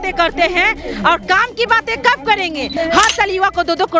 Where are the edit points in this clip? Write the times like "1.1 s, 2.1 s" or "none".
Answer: 2.7 s